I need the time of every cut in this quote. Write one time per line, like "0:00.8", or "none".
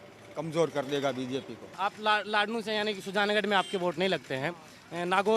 0:01.6